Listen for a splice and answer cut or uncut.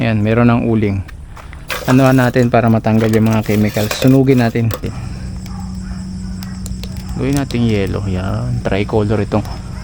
cut